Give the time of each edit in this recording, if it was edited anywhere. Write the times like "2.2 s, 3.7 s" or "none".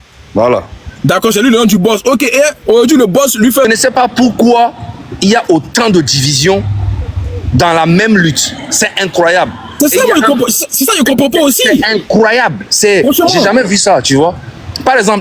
3.6 s

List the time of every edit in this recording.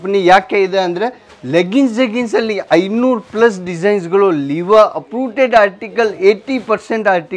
none

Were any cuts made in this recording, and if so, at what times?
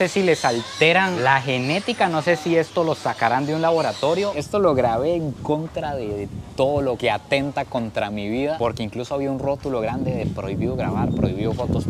4.3 s

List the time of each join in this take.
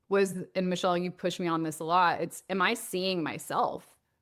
none

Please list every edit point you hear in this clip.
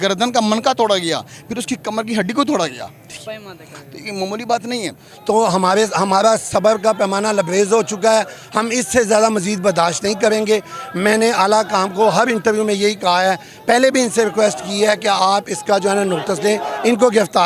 5.0 s

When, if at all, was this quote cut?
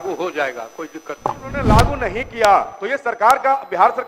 1.7 s

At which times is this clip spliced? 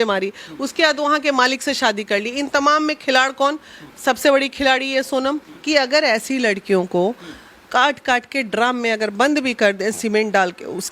5.5 s

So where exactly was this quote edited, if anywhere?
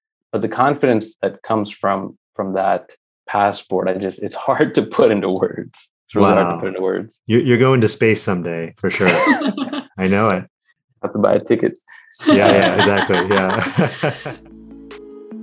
14.2 s

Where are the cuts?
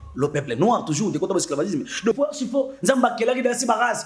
2.2 s

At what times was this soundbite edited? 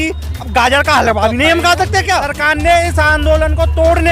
2.3 s

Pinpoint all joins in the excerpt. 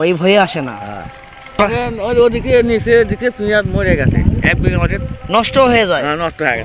1.6 s

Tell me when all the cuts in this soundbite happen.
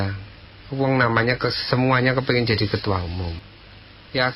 3.4 s

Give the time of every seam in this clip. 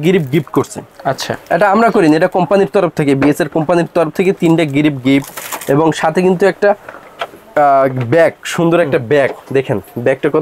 none

